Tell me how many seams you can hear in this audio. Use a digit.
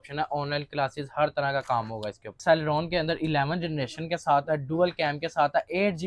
1